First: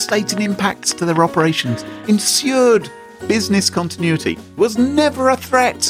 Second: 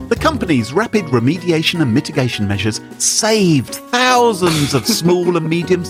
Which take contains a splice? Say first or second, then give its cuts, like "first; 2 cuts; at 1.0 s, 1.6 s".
first; 1 cut; at 4.4 s